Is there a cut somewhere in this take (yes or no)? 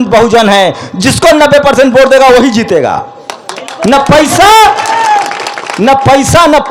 no